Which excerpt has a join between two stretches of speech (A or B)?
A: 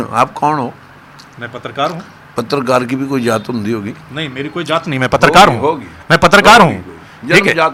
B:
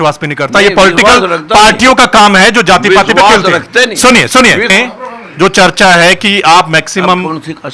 B